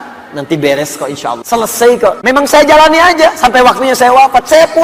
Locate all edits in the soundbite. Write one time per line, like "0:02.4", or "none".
0:01.4
0:02.2